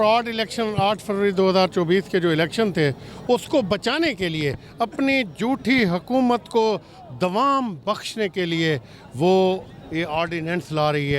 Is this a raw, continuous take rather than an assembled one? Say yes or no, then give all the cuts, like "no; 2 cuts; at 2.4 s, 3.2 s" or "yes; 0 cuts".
yes; 0 cuts